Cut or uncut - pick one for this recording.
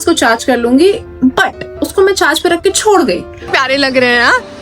cut